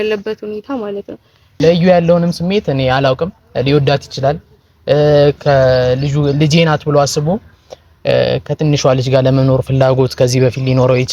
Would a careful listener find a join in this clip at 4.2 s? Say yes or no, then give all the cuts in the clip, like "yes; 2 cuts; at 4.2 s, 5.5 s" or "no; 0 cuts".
no; 1 cut; at 1.5 s